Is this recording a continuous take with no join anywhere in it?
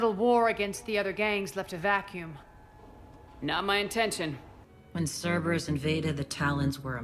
no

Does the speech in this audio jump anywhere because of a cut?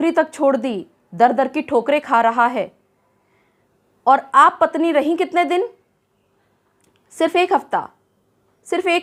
no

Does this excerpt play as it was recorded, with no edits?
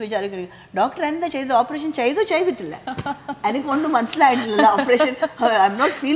yes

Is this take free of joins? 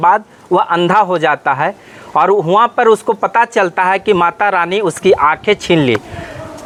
yes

